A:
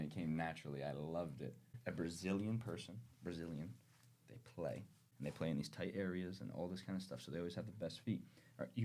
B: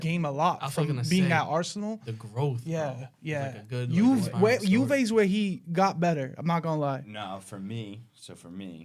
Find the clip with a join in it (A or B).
A